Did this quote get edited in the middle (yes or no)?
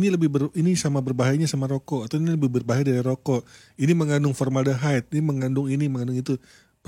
no